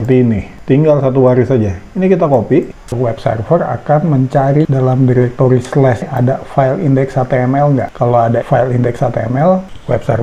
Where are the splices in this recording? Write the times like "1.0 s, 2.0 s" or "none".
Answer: 2.8 s